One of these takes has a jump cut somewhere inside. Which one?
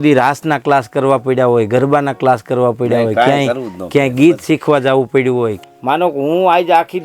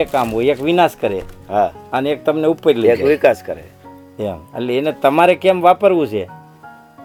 first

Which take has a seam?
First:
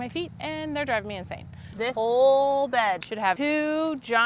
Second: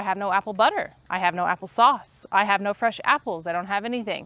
first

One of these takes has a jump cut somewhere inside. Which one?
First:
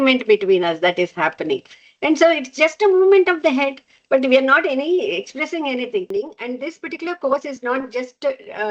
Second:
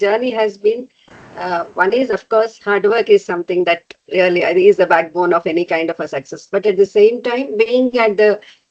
first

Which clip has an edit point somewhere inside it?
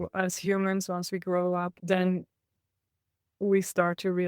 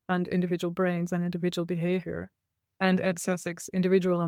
first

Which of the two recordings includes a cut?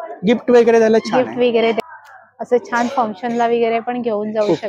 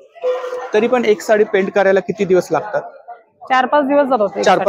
first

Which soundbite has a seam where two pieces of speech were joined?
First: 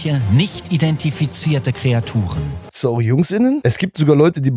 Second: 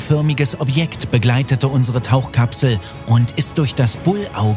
first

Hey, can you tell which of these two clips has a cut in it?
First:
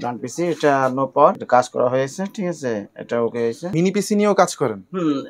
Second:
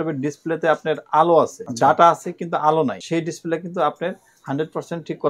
second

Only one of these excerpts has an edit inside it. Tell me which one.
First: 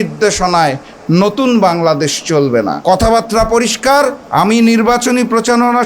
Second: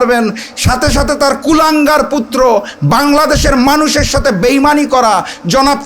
first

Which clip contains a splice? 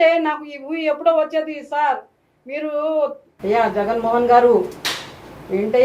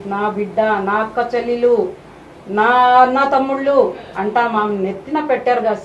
first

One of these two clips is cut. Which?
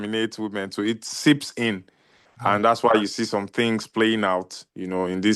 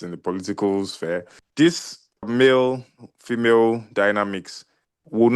second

